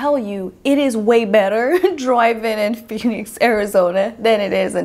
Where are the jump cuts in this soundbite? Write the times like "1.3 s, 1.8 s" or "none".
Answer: none